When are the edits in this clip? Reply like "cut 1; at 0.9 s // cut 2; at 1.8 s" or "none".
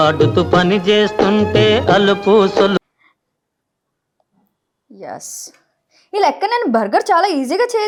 none

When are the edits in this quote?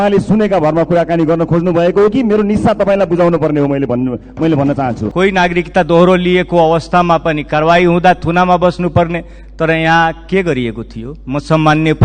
cut 1; at 5.0 s

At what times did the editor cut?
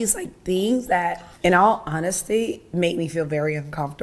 cut 1; at 1.2 s

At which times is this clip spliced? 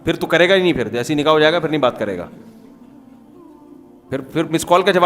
cut 1; at 2.3 s // cut 2; at 3.9 s

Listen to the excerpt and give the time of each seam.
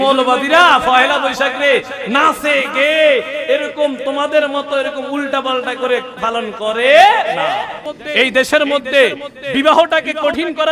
cut 1; at 7.9 s

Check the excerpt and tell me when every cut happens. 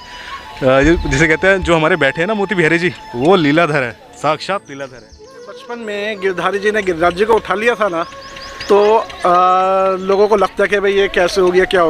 cut 1; at 5.4 s

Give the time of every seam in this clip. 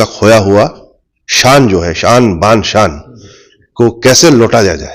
none

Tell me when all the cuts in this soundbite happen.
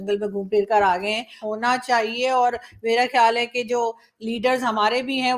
cut 1; at 1.4 s

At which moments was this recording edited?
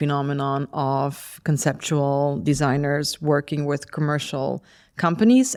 none

